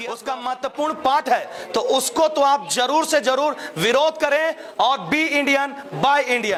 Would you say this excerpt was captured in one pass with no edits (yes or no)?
yes